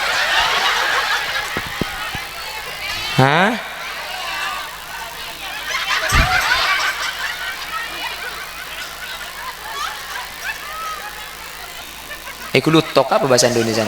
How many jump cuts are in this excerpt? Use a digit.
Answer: 1